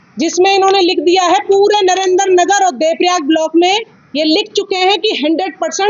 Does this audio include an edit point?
no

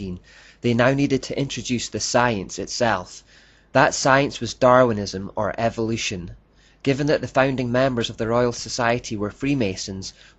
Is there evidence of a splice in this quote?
yes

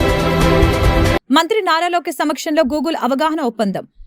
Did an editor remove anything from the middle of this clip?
yes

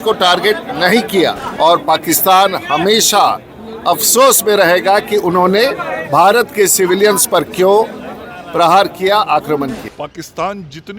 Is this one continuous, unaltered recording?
no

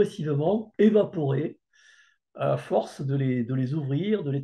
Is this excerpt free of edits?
yes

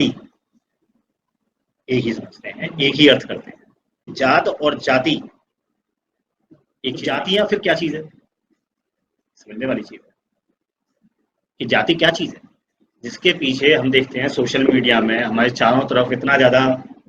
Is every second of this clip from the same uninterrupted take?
no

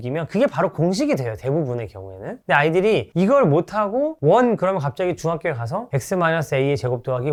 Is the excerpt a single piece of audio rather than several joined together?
yes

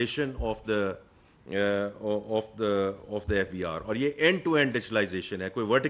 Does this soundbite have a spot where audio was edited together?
no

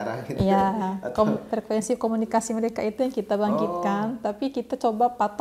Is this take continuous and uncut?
yes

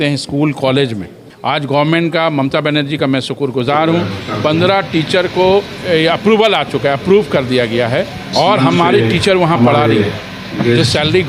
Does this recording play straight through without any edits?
no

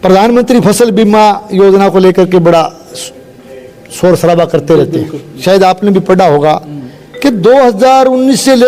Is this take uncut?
no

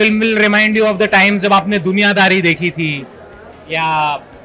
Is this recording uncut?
yes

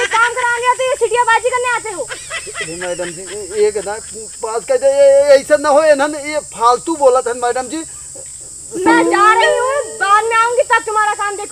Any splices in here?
no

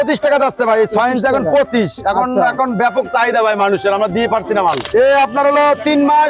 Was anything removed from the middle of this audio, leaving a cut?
yes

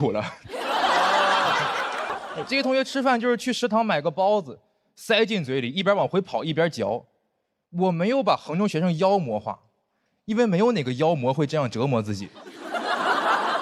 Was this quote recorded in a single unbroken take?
no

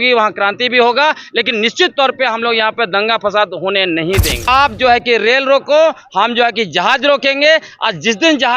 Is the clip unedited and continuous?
no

